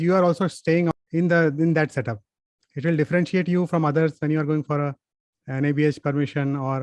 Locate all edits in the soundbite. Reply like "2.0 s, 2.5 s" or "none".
0.9 s